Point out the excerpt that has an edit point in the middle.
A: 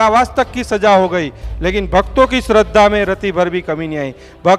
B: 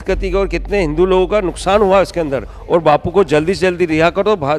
B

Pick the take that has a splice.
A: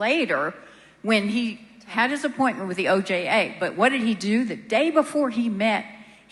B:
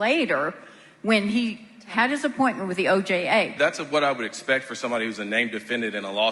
B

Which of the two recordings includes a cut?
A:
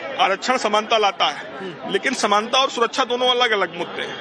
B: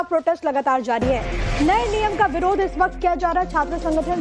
B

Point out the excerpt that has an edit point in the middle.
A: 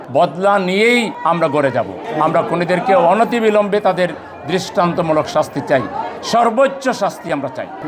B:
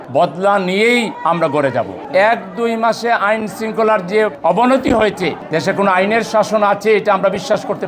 B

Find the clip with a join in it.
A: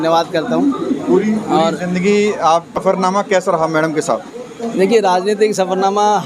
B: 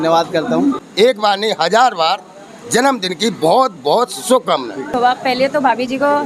B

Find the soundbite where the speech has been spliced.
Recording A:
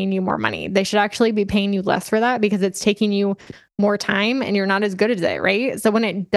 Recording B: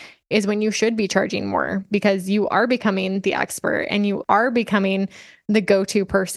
B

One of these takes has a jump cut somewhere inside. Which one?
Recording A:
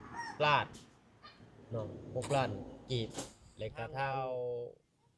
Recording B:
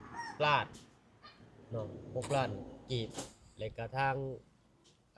A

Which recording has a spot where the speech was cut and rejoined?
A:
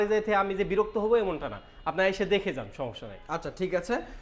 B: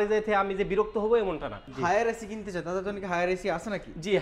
B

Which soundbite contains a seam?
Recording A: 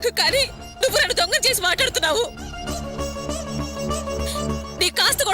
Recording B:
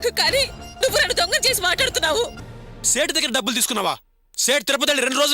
B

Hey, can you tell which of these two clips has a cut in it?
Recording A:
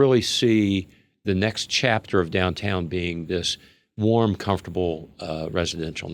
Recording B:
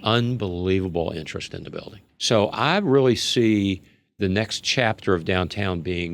B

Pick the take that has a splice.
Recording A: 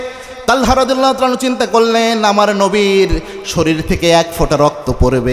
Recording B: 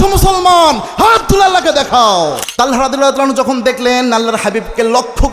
B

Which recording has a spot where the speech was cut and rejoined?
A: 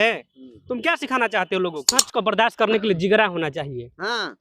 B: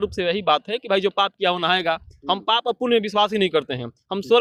A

